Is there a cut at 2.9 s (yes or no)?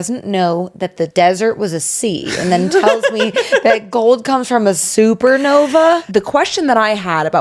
no